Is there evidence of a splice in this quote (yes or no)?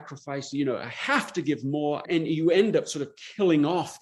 yes